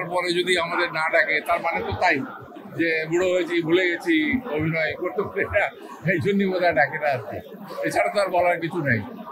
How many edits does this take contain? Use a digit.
0